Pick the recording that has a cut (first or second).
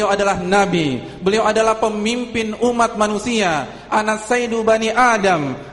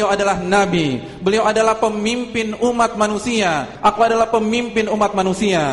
second